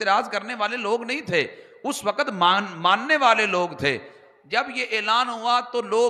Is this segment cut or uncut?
uncut